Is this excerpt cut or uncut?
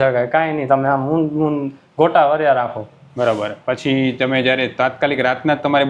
uncut